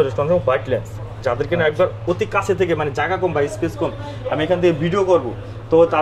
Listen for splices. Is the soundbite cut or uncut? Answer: uncut